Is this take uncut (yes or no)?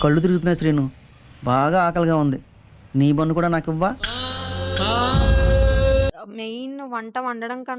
no